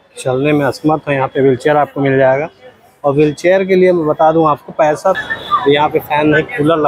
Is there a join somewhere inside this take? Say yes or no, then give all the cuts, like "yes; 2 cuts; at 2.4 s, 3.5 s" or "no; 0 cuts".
yes; 1 cut; at 5.2 s